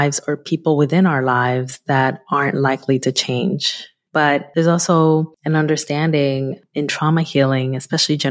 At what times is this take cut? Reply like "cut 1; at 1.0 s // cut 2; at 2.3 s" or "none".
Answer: cut 1; at 4.2 s // cut 2; at 5.4 s